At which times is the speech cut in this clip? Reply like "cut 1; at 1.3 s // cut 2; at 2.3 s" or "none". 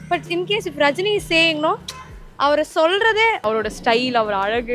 cut 1; at 3.4 s